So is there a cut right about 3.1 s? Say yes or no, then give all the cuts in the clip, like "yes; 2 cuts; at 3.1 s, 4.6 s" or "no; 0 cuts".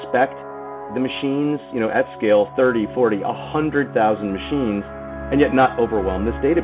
no; 2 cuts; at 0.8 s, 5.1 s